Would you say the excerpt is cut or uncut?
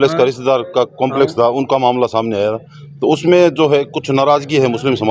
uncut